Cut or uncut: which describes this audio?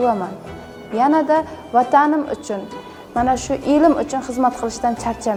uncut